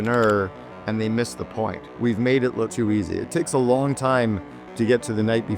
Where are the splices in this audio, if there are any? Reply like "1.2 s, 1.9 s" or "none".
1.8 s, 2.7 s